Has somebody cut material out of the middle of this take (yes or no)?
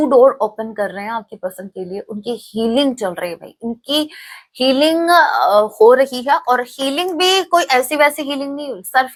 no